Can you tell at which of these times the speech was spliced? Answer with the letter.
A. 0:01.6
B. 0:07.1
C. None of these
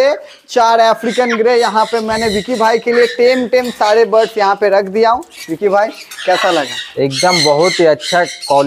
C